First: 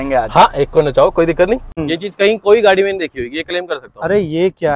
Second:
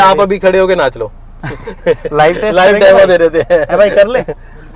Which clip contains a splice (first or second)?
first